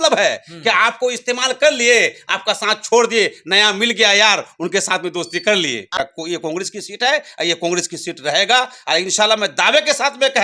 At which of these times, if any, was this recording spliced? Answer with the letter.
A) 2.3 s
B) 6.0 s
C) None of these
B